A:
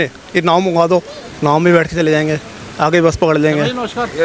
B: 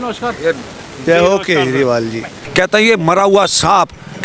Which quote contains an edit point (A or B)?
B